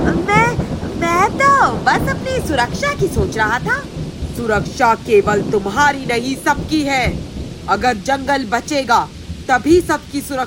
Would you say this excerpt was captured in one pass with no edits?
yes; 0 cuts

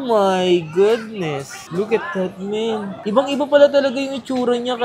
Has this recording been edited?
no; 0 cuts

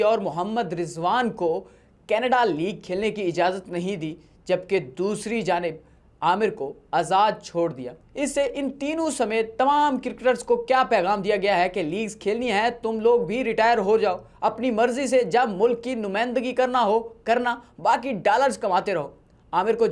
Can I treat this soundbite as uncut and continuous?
yes; 0 cuts

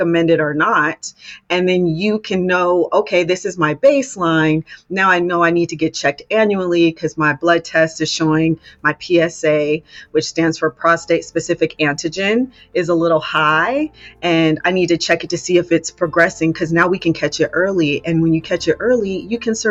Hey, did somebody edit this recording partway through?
no; 0 cuts

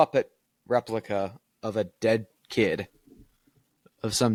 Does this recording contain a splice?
no; 0 cuts

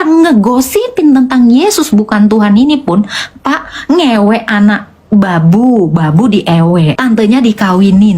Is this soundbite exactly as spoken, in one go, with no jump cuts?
no; 1 cut; at 7.0 s

